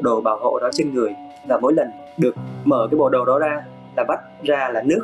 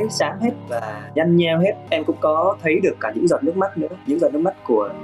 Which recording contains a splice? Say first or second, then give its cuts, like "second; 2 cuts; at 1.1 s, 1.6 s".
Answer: second; 1 cut; at 1.8 s